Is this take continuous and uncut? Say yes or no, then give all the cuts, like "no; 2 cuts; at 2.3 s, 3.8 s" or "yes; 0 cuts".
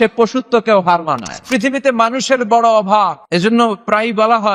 no; 2 cuts; at 1.5 s, 3.2 s